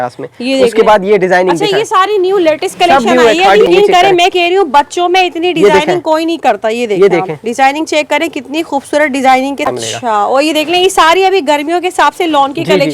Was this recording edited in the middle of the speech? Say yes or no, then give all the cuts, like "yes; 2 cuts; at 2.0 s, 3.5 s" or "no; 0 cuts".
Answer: yes; 2 cuts; at 3.7 s, 9.7 s